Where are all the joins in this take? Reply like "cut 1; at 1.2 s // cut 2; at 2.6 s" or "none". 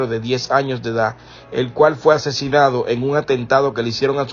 cut 1; at 2.7 s